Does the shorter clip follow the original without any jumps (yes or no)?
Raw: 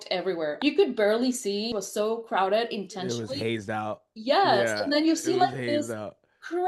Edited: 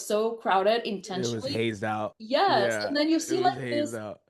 no